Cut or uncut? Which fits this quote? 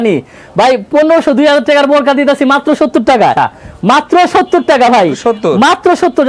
cut